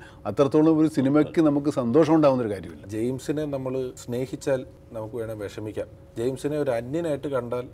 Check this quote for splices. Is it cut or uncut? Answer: cut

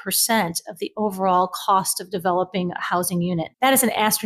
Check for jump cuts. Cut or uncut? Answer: uncut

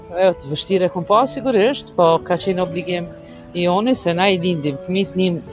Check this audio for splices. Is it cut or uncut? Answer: uncut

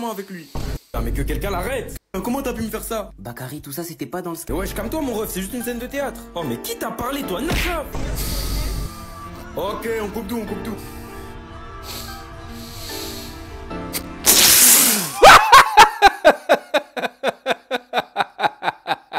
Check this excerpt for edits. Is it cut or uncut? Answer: cut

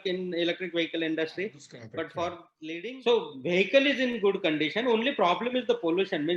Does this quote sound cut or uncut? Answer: cut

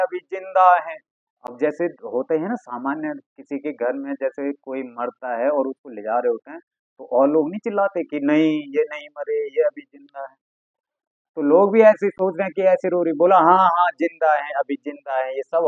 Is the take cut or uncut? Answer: uncut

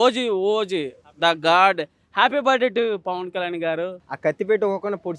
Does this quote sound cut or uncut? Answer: cut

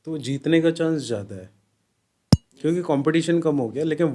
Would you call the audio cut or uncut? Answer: uncut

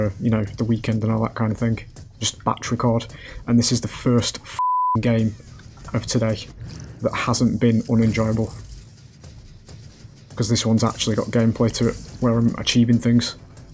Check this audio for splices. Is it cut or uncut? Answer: uncut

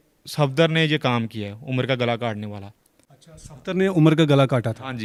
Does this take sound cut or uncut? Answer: uncut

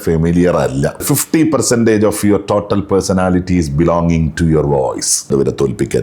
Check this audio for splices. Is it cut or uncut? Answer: cut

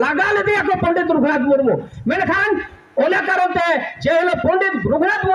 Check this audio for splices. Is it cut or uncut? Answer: uncut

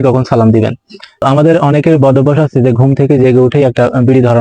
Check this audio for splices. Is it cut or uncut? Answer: cut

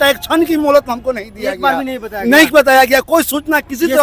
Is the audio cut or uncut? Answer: uncut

